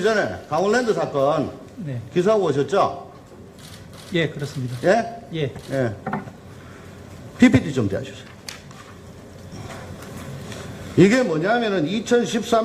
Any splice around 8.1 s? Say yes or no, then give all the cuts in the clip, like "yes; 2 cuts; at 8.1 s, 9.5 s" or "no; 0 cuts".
no; 1 cut; at 9.6 s